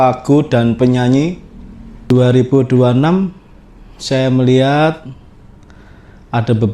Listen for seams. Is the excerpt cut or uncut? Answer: cut